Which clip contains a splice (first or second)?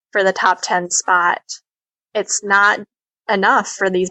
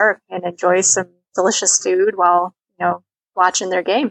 second